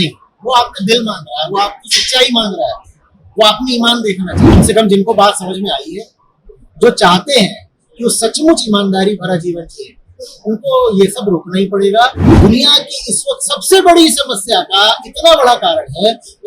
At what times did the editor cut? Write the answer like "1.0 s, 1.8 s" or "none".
4.4 s, 12.3 s